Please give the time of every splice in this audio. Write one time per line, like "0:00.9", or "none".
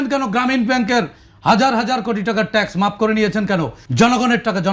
0:03.8